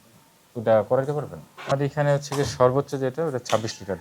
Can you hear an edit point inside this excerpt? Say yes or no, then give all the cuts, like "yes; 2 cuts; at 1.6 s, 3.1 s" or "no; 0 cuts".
yes; 1 cut; at 1.7 s